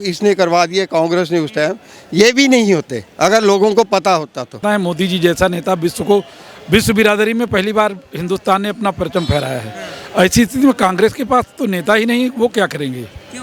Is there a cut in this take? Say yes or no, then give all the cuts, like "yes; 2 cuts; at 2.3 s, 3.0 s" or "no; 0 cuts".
yes; 1 cut; at 4.6 s